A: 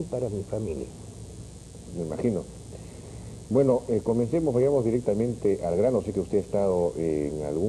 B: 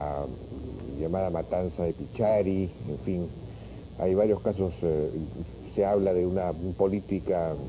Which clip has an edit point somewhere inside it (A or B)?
A